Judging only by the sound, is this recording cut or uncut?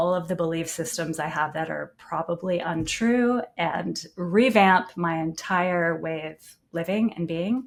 uncut